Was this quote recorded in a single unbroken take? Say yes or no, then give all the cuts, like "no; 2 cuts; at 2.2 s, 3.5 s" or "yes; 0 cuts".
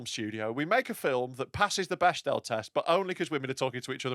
yes; 0 cuts